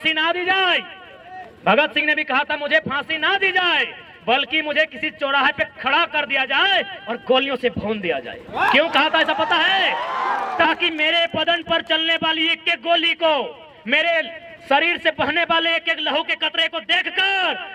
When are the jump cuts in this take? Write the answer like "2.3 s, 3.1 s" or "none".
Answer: none